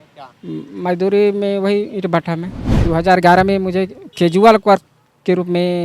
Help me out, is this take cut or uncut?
cut